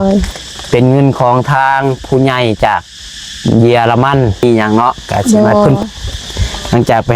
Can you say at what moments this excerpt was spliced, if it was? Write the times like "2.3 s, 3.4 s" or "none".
4.4 s

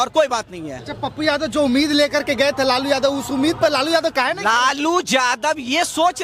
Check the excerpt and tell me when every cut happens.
none

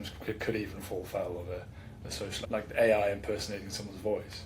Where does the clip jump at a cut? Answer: 2.4 s

